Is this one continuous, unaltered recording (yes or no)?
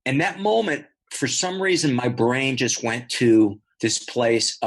no